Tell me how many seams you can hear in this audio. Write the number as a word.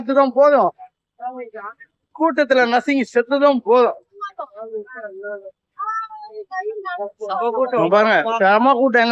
zero